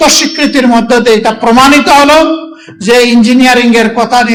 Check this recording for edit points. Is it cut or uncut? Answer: uncut